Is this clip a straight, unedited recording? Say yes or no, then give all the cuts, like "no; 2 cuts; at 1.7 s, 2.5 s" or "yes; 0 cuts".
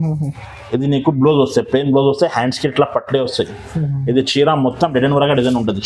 yes; 0 cuts